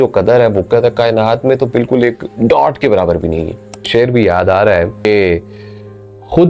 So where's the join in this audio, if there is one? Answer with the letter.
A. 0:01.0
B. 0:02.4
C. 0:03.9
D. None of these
C